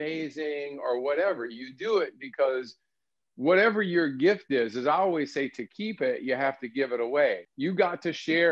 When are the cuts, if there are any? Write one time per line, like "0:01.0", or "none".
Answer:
0:07.5